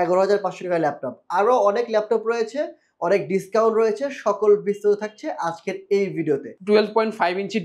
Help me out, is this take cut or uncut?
cut